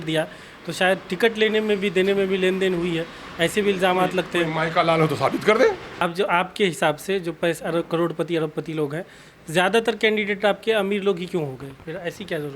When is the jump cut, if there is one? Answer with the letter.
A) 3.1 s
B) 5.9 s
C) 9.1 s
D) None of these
B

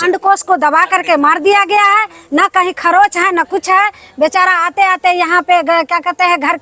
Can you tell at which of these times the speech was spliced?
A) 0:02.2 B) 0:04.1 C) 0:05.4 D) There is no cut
D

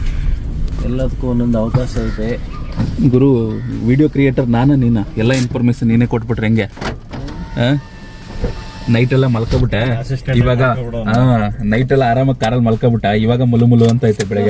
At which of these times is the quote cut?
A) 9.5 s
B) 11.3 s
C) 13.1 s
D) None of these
D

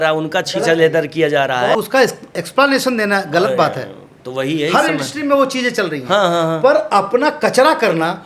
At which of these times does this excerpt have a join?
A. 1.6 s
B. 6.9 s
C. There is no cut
A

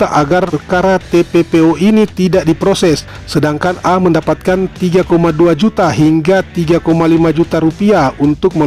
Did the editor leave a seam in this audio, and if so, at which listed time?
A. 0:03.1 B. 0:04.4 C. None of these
A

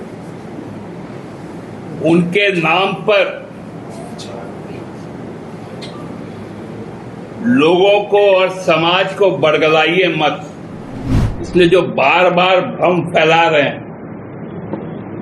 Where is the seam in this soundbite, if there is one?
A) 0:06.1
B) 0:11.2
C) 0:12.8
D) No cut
B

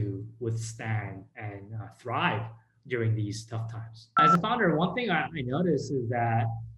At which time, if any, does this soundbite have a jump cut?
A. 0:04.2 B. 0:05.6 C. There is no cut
A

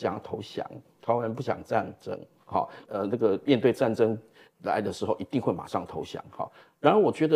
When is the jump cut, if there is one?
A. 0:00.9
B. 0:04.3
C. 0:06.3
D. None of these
D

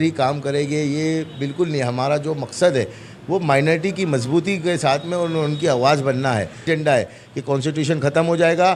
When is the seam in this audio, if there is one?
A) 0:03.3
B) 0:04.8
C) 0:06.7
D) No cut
C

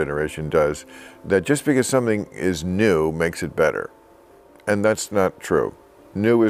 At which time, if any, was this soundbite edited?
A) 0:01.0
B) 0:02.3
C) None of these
C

